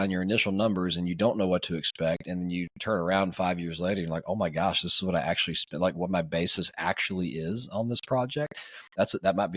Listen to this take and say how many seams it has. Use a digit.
0